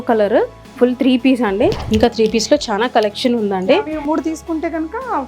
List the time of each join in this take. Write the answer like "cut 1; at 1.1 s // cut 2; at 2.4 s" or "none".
cut 1; at 1.8 s